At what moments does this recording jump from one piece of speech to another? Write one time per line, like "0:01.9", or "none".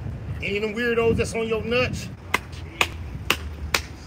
0:02.1